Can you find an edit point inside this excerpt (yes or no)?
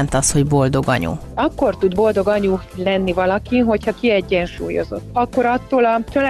yes